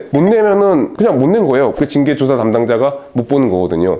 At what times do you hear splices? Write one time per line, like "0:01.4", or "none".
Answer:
0:01.7